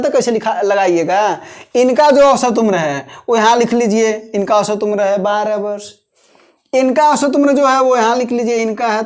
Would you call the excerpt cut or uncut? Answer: uncut